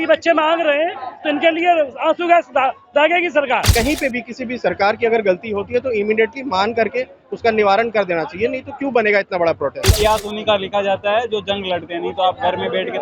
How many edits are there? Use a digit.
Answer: 2